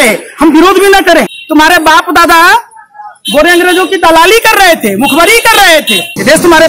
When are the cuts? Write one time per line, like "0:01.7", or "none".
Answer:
0:01.3
0:05.6